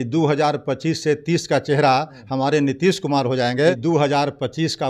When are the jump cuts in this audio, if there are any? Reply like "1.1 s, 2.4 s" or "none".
3.8 s